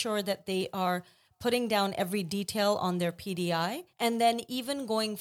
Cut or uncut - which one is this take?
cut